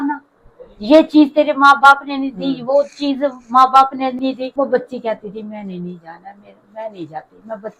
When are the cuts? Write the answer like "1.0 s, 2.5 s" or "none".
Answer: 4.4 s